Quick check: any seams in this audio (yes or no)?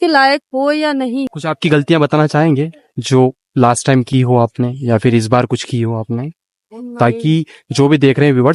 yes